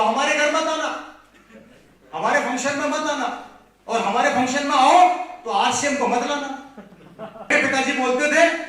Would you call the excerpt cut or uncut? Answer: cut